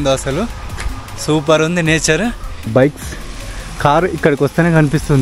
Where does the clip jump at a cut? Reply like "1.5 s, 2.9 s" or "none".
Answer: 2.7 s